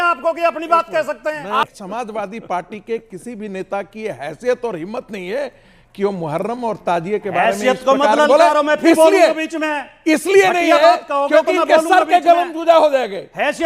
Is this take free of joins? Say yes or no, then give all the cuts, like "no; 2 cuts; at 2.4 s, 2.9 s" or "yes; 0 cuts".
no; 1 cut; at 1.6 s